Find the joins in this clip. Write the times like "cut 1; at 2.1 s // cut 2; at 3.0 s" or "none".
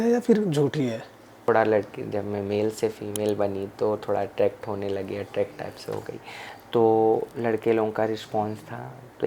cut 1; at 1.4 s